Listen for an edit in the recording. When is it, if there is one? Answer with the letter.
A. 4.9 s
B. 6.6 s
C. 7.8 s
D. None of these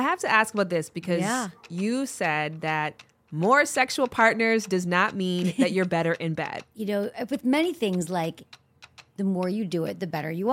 B